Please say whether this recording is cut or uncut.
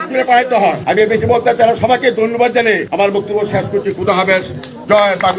cut